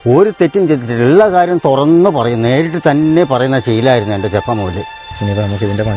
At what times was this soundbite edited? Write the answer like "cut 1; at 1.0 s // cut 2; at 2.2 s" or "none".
cut 1; at 5.0 s